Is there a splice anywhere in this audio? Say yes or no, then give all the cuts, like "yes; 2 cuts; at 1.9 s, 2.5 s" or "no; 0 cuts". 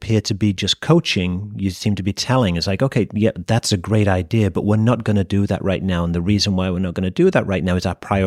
no; 0 cuts